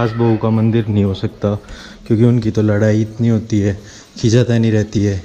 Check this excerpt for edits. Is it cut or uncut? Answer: uncut